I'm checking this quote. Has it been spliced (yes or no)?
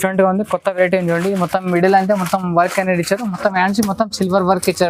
no